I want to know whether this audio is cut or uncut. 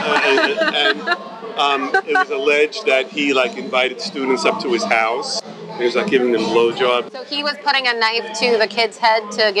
cut